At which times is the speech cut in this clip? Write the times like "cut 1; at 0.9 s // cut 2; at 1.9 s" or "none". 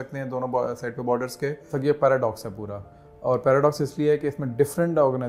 cut 1; at 1.7 s

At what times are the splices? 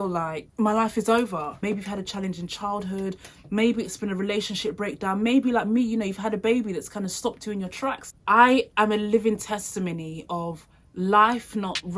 cut 1; at 1.5 s // cut 2; at 8.0 s

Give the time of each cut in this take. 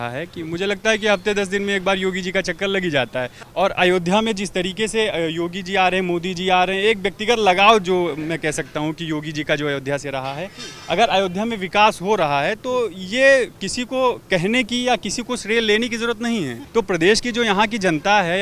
cut 1; at 3.4 s // cut 2; at 16.6 s

